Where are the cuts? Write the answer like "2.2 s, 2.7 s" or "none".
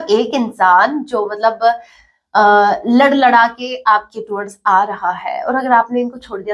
none